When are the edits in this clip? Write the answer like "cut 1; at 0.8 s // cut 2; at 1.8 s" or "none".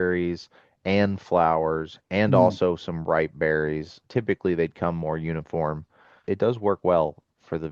cut 1; at 6.2 s